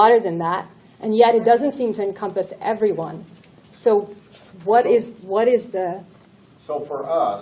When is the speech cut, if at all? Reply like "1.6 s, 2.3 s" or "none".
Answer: none